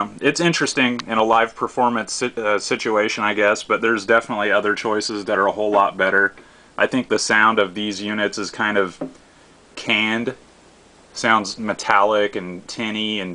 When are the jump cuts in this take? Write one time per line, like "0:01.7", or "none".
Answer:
0:01.1